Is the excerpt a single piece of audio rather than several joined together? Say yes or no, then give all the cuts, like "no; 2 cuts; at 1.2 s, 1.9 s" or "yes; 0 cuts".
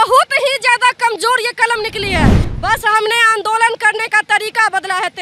no; 1 cut; at 2.4 s